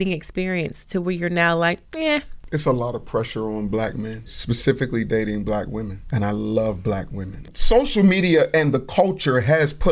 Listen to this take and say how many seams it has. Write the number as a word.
four